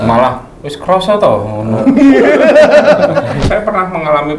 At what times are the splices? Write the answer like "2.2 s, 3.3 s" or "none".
3.4 s